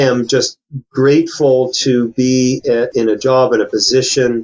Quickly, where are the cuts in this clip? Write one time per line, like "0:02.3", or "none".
0:02.9